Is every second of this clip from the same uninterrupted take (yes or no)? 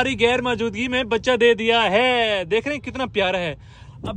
yes